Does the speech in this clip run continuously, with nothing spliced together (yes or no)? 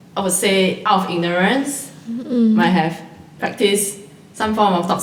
yes